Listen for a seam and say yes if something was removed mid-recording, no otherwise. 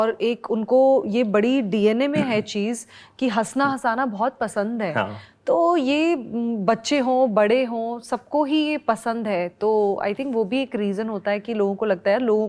no